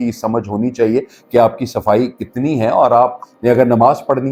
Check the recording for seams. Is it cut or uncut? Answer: uncut